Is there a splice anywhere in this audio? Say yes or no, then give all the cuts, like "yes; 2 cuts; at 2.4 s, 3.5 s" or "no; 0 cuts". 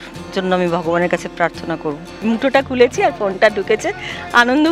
yes; 1 cut; at 2.2 s